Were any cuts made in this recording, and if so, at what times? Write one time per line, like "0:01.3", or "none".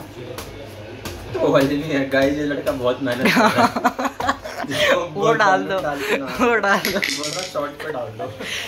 none